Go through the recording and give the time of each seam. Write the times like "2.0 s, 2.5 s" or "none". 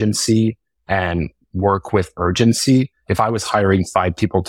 3.0 s